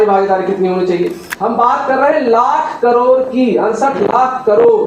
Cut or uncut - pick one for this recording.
cut